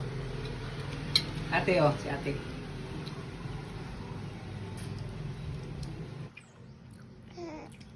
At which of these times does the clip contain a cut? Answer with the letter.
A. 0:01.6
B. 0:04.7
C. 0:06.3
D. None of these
C